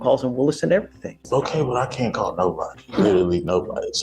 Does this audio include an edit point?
yes; 1 cut; at 1.2 s

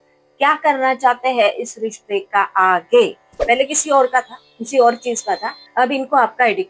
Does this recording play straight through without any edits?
no; 1 cut; at 3.3 s

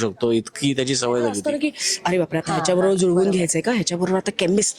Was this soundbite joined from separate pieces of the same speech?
yes; 1 cut; at 1.4 s

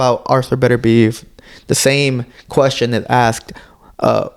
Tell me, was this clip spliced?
no; 0 cuts

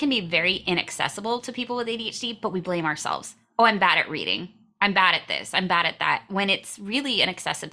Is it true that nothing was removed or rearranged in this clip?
yes; 0 cuts

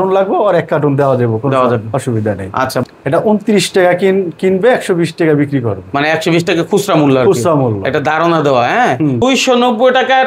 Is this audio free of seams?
no; 2 cuts; at 2.8 s, 9.2 s

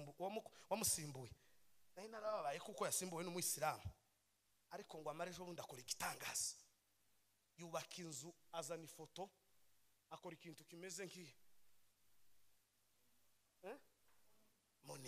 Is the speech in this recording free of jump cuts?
yes; 0 cuts

